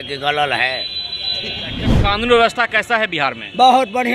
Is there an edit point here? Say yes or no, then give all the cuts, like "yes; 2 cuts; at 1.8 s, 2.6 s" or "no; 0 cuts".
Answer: yes; 1 cut; at 2.0 s